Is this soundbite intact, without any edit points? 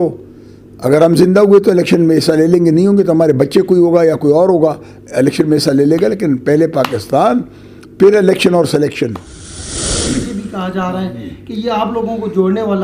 no; 1 cut; at 9.8 s

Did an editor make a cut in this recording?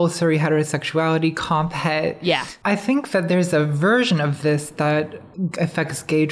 no; 0 cuts

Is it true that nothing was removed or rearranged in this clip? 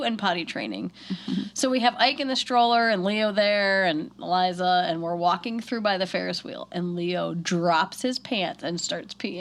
yes; 0 cuts

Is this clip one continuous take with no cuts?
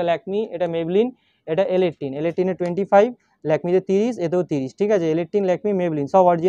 yes; 0 cuts

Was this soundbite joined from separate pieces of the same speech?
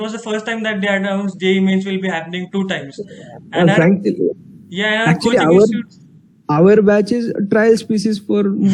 no; 0 cuts

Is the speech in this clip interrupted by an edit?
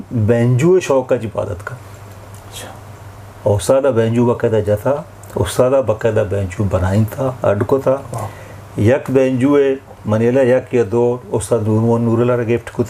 no; 0 cuts

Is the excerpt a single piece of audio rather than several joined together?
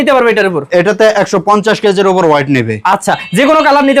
yes; 0 cuts

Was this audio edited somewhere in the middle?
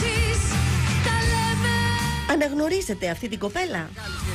no; 0 cuts

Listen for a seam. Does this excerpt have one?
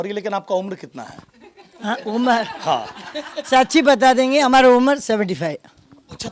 no; 0 cuts

